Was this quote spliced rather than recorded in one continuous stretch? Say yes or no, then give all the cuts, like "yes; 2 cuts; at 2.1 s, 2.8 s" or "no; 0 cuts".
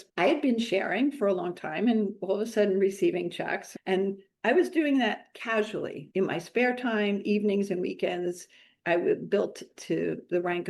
yes; 1 cut; at 3.7 s